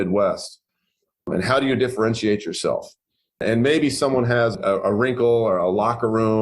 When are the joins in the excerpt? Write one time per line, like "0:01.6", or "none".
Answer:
0:01.3
0:03.4
0:04.5